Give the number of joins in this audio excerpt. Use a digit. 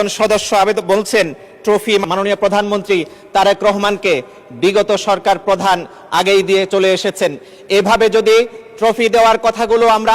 1